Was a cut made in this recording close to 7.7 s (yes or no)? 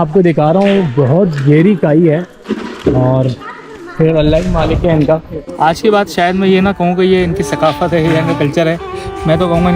no